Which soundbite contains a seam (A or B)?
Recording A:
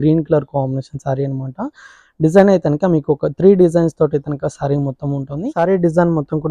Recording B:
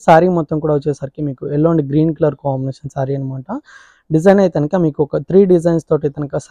A